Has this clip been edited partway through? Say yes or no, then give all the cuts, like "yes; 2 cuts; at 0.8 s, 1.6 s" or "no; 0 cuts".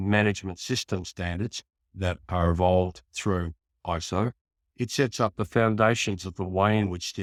no; 0 cuts